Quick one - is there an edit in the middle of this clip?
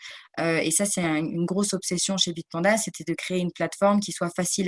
no; 0 cuts

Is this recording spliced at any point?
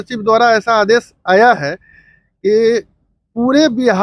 no; 0 cuts

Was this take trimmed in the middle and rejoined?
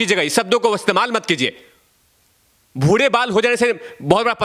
no; 0 cuts

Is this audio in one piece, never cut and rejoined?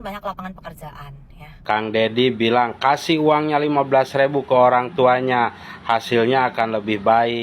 no; 1 cut; at 1.5 s

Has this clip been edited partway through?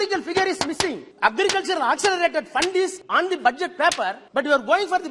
yes; 3 cuts; at 1.1 s, 3.0 s, 4.2 s

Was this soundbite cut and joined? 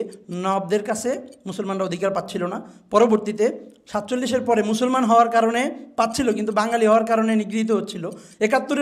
no; 0 cuts

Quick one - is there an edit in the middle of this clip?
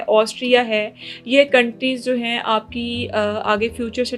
no; 0 cuts

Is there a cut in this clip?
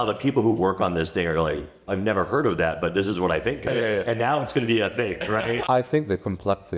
yes; 3 cuts; at 1.7 s, 3.7 s, 5.6 s

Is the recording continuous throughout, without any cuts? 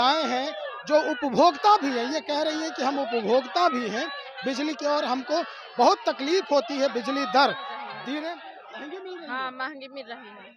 no; 1 cut; at 8.2 s

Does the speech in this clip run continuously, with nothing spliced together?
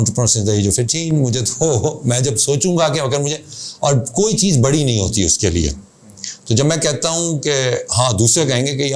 yes; 0 cuts

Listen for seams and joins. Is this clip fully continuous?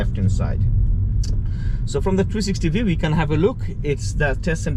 yes; 0 cuts

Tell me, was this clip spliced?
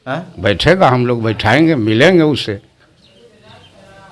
no; 0 cuts

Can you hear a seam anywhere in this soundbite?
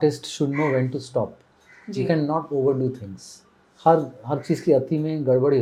no; 0 cuts

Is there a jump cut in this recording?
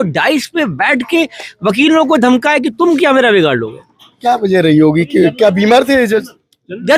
no; 0 cuts

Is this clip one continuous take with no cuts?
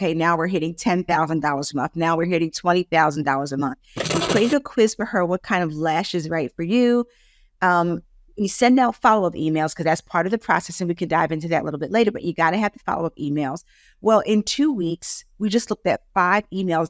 no; 1 cut; at 4.1 s

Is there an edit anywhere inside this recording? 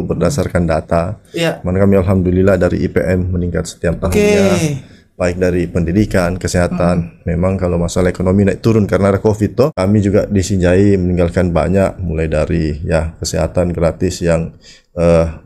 yes; 1 cut; at 9.7 s

